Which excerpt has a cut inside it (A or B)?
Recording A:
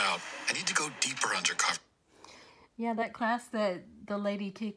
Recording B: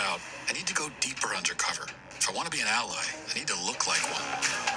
B